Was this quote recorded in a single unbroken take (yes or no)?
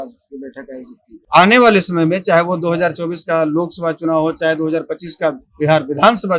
no